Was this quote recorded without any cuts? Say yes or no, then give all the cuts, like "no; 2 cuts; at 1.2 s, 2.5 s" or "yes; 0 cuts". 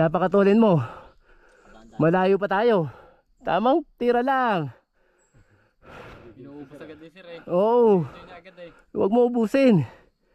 yes; 0 cuts